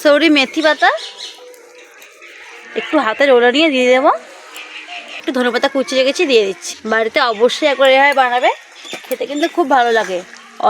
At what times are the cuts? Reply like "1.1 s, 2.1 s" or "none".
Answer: 5.2 s, 6.7 s